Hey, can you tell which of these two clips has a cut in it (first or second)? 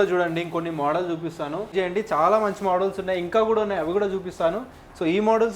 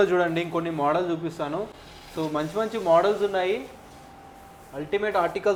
first